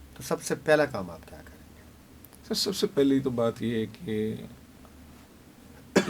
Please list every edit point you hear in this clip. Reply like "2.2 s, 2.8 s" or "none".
none